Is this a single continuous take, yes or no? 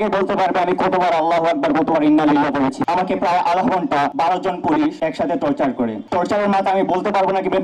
no